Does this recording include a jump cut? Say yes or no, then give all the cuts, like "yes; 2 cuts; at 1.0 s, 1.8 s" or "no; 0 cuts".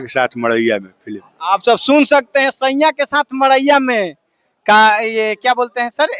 no; 0 cuts